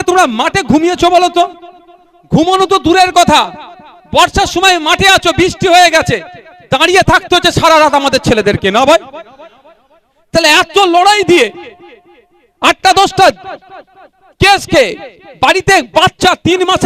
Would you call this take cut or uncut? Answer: uncut